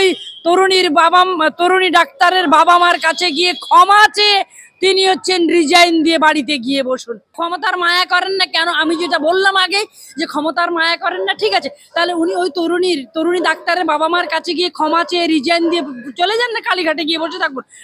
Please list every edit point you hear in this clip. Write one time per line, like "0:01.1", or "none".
0:07.2